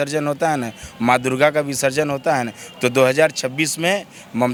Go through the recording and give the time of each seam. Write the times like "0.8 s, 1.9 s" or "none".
none